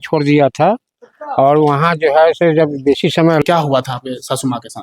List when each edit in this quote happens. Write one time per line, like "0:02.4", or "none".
0:03.4